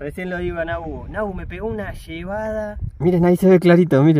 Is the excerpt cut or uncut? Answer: cut